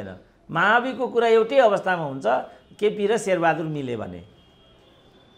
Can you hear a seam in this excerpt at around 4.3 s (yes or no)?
no